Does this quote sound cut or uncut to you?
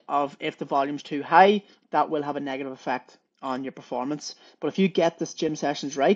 uncut